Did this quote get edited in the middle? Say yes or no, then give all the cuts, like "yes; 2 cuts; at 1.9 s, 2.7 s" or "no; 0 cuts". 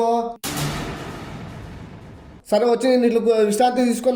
yes; 1 cut; at 2.2 s